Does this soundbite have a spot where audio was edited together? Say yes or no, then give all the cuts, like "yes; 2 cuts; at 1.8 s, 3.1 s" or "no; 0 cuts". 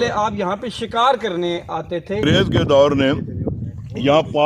yes; 1 cut; at 2.2 s